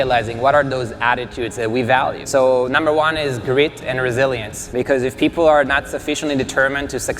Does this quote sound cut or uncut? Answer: cut